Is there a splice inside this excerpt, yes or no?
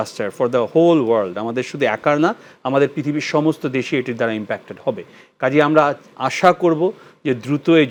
no